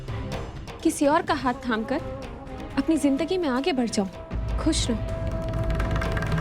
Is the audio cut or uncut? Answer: uncut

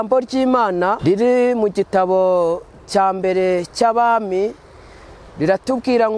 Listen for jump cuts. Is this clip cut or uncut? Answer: cut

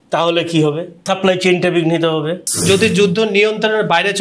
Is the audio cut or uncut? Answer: cut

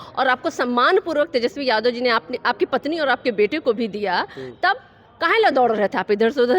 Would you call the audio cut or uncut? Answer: uncut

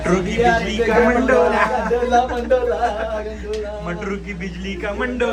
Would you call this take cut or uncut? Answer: uncut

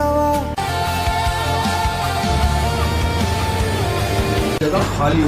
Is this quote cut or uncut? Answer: uncut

